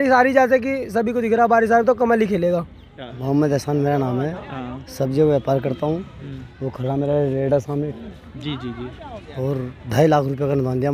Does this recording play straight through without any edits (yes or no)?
no